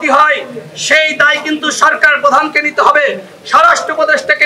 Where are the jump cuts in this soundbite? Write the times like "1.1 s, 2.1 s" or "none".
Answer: none